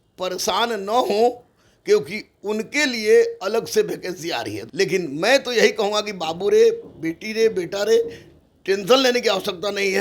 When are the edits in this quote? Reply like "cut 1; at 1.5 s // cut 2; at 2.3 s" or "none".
cut 1; at 4.6 s